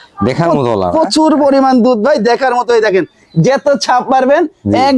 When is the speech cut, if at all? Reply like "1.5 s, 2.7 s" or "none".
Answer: none